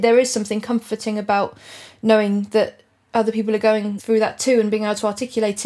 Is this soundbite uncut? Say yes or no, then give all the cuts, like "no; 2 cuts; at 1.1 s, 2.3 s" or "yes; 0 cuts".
no; 1 cut; at 3.9 s